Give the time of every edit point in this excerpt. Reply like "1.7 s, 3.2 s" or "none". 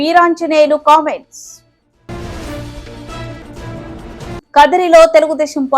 none